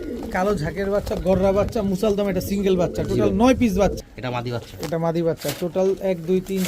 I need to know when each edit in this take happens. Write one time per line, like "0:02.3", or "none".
0:04.0